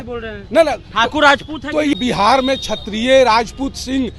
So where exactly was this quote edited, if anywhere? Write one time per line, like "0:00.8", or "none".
0:02.0